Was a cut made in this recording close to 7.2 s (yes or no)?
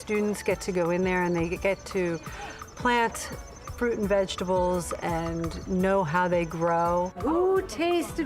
yes